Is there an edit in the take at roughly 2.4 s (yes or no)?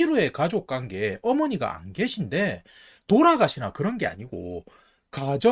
no